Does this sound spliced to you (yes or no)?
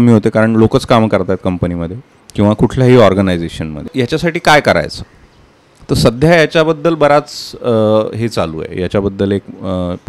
yes